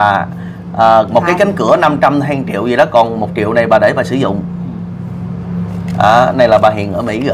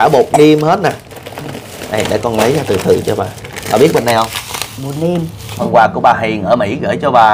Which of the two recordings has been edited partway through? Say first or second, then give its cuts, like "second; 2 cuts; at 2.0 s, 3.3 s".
second; 1 cut; at 5.6 s